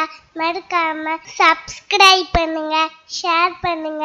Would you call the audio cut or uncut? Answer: cut